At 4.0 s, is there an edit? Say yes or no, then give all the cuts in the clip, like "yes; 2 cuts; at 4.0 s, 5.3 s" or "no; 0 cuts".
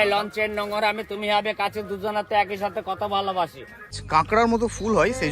yes; 1 cut; at 4.0 s